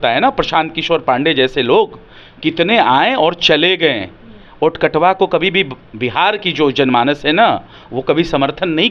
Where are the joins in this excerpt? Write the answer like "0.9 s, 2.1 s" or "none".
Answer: none

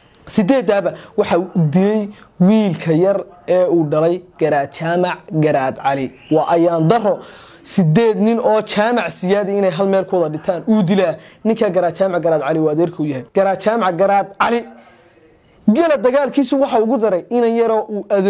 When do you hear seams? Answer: 13.2 s

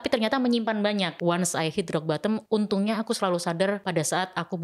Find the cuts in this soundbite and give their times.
1.1 s, 2.4 s, 3.8 s

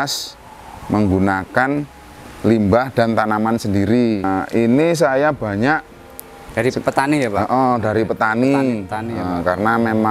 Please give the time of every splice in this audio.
4.2 s

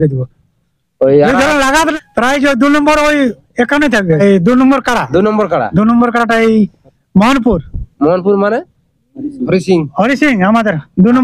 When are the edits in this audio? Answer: 2.0 s, 4.2 s

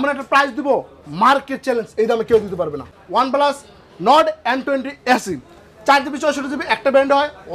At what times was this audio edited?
3.0 s

